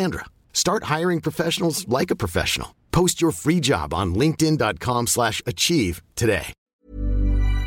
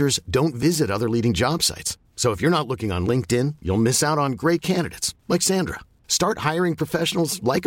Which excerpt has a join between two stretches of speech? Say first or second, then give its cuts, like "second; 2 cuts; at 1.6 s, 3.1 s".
first; 1 cut; at 6.7 s